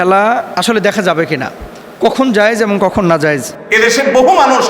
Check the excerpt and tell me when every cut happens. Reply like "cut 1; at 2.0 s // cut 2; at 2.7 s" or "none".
cut 1; at 3.5 s